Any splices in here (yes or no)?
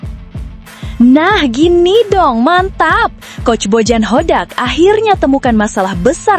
yes